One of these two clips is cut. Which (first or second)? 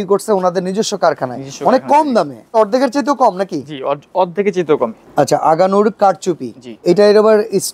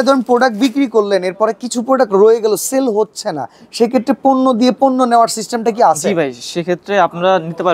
first